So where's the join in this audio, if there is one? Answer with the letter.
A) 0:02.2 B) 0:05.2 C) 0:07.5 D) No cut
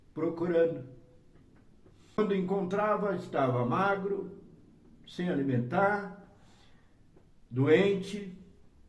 A